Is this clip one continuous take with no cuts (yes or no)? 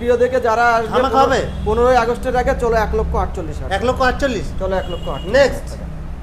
yes